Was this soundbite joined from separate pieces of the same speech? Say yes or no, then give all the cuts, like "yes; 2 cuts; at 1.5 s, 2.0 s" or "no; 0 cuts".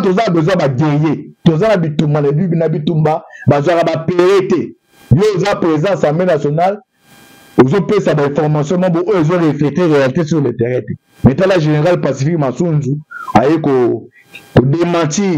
no; 0 cuts